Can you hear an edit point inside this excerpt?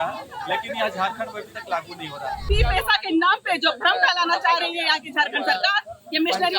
yes; 1 cut; at 2.4 s

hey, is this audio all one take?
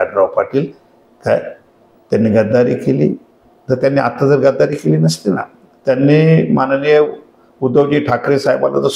yes; 0 cuts

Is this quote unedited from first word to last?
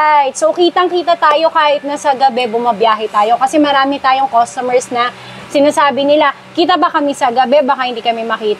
yes; 0 cuts

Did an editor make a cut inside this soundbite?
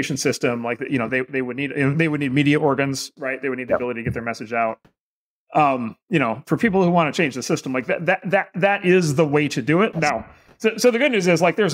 no; 0 cuts

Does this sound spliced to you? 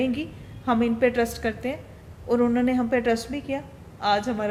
no; 0 cuts

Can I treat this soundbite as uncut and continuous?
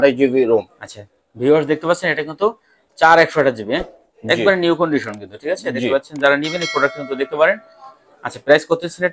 yes; 0 cuts

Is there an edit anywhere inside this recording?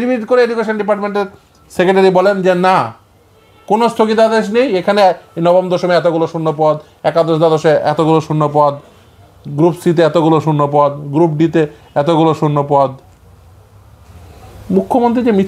no; 0 cuts

